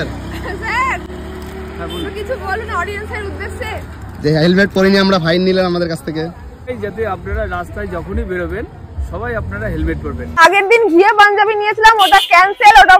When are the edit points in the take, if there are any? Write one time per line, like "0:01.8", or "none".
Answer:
0:06.7
0:10.4